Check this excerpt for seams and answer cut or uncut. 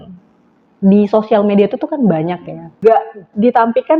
cut